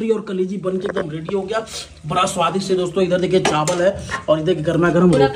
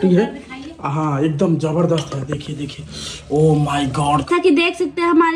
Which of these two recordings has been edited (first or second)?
second